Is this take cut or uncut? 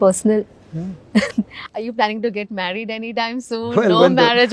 cut